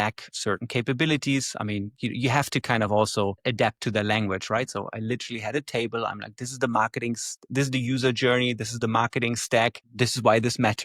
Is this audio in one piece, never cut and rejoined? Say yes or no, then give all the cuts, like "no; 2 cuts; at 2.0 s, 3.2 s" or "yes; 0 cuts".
yes; 0 cuts